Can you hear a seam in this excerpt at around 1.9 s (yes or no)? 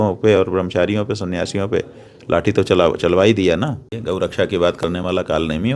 no